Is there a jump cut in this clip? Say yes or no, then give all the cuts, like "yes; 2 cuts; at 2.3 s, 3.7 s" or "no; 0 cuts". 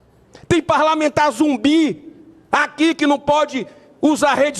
no; 0 cuts